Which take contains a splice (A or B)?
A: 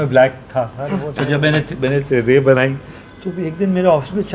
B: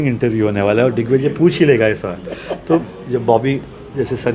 B